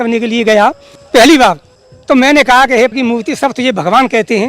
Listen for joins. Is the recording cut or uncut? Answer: cut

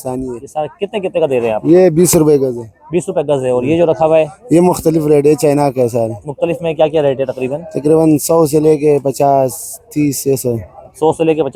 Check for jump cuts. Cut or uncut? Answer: uncut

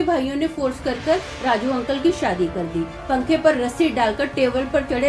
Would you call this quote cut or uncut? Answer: cut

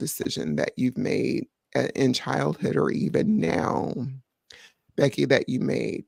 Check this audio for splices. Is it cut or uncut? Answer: uncut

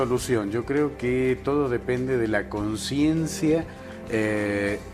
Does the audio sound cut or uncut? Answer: cut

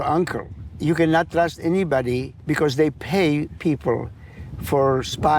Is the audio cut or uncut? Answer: cut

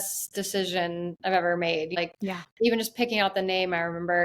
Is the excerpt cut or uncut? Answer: cut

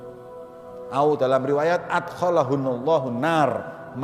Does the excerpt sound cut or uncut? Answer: cut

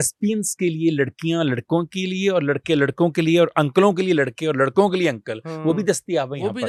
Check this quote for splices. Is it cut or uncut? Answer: uncut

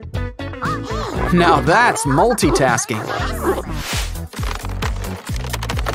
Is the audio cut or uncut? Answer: uncut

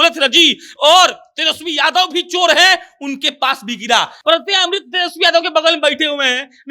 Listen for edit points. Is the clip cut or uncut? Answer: cut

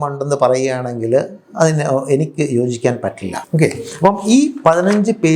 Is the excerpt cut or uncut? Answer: cut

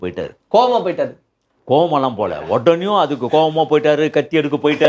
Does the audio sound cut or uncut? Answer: uncut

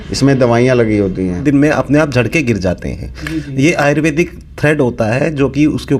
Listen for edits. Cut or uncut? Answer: cut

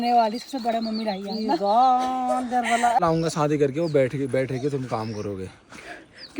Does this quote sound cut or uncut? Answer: cut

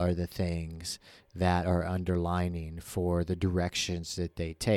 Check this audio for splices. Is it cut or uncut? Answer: uncut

